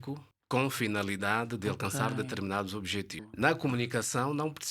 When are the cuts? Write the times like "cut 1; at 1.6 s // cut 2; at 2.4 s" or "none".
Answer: none